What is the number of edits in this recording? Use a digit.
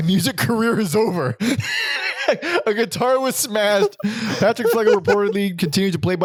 0